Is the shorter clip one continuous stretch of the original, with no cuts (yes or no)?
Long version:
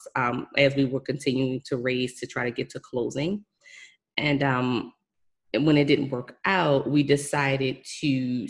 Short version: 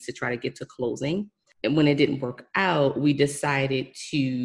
no